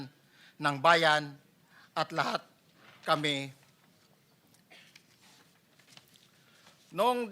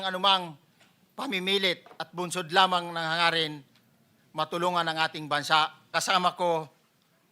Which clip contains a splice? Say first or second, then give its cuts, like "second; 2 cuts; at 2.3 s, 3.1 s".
second; 1 cut; at 5.9 s